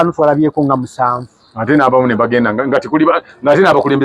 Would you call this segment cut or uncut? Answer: uncut